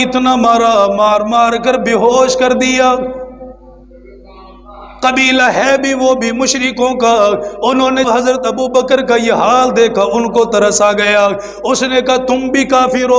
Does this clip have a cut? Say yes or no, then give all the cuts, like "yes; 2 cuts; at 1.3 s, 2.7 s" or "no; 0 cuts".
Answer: yes; 1 cut; at 8.1 s